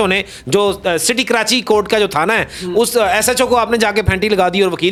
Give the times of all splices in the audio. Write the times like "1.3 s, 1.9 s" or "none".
none